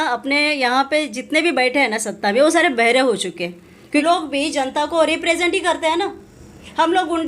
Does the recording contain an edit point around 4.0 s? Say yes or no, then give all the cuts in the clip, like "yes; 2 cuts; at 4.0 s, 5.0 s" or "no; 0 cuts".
yes; 1 cut; at 4.0 s